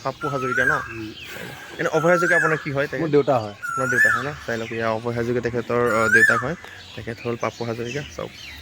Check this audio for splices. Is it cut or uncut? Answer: uncut